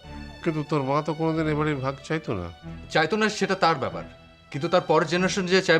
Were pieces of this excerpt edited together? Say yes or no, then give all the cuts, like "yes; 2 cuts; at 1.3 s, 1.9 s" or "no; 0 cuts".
no; 0 cuts